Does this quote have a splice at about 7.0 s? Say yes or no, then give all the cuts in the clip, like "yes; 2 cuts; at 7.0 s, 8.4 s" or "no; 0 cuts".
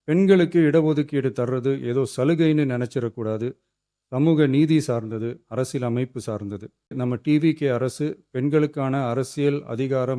yes; 1 cut; at 7.0 s